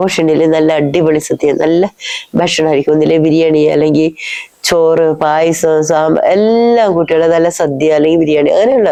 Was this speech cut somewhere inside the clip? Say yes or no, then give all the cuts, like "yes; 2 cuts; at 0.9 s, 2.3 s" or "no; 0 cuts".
no; 0 cuts